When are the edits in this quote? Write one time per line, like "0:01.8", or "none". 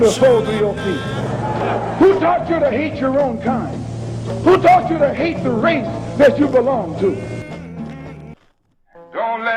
0:08.3